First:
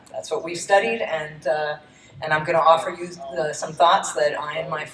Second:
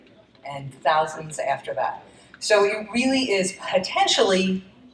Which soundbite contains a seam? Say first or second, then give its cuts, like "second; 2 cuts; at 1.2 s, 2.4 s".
second; 1 cut; at 2.0 s